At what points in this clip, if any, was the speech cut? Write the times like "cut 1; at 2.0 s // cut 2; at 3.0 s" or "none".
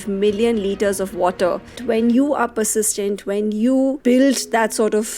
cut 1; at 1.8 s // cut 2; at 4.0 s